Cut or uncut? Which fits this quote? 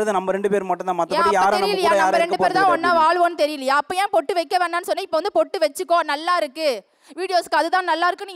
uncut